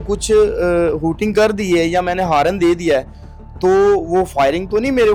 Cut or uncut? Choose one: uncut